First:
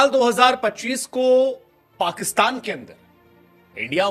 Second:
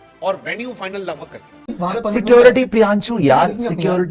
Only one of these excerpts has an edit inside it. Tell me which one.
second; 1 cut; at 1.7 s

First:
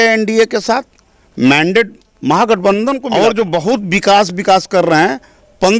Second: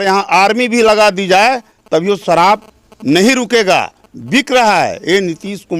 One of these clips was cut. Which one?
first; 1 cut; at 3.0 s

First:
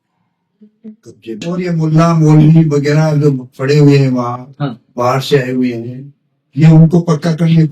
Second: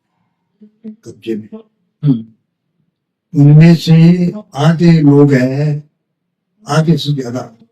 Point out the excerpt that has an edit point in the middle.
first; 1 cut; at 1.5 s

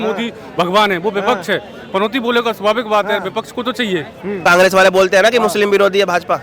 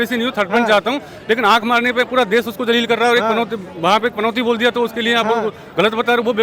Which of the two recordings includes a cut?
first; 1 cut; at 4.4 s

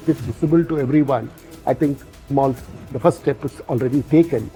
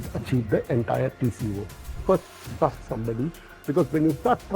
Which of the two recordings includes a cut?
second; 1 cut; at 1.9 s

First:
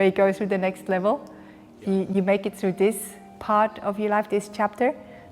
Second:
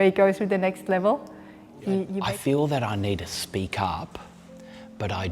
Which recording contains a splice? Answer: second; 1 cut; at 2.1 s

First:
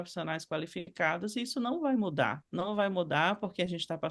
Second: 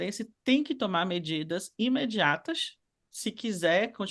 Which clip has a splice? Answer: first; 1 cut; at 2.4 s

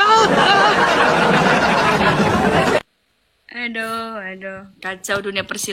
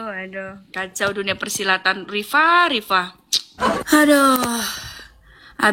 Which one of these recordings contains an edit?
second; 1 cut; at 3.8 s

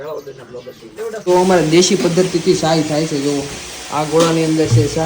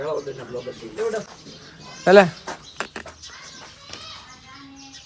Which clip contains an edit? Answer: first; 1 cut; at 1.2 s

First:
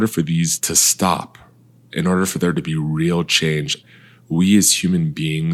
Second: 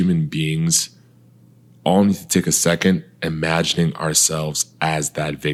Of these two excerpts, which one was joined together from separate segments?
first; 1 cut; at 3.8 s

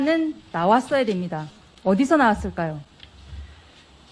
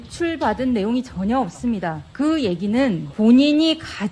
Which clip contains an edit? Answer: second; 2 cuts; at 2.0 s, 3.1 s

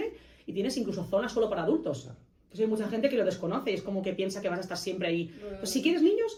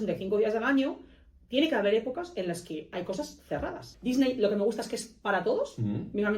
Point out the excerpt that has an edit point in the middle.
second; 1 cut; at 3.9 s

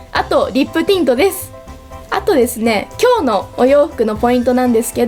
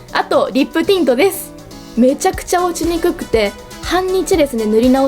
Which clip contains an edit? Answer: second; 1 cut; at 1.9 s

